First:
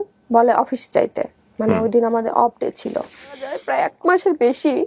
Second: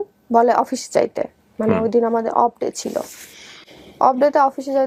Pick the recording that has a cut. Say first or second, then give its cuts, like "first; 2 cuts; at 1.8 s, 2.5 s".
first; 1 cut; at 3.6 s